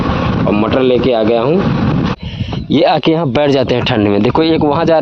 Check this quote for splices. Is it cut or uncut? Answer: cut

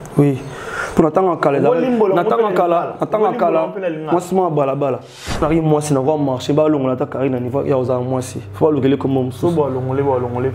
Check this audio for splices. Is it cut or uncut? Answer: cut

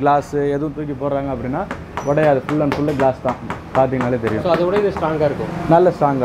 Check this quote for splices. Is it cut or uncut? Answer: uncut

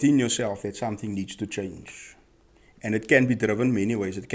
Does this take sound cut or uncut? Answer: uncut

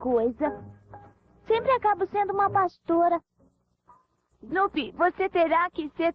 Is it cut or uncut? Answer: cut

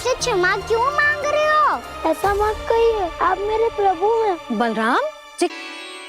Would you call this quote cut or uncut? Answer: uncut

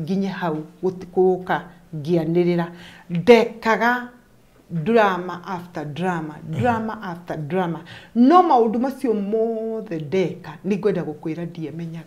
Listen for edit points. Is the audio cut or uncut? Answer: uncut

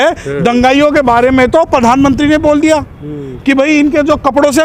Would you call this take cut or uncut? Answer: uncut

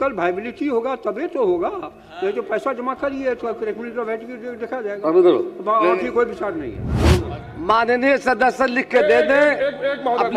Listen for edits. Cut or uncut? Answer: cut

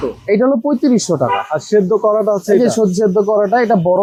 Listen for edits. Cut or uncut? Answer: uncut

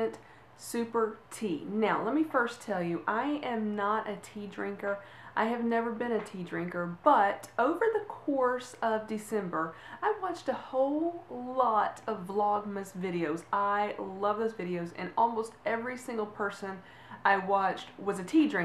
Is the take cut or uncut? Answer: cut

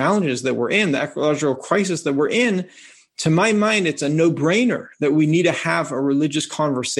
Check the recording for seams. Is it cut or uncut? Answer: uncut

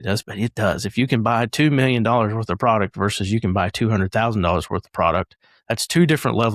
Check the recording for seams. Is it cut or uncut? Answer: uncut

